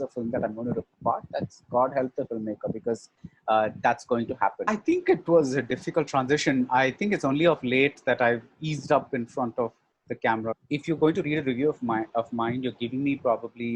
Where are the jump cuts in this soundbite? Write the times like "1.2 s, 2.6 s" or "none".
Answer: 4.7 s, 10.6 s